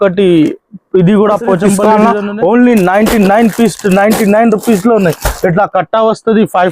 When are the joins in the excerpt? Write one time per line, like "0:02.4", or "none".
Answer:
0:01.8